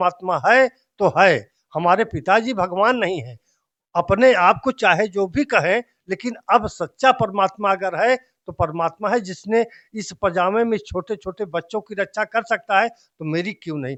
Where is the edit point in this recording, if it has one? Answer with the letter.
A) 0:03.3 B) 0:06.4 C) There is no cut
C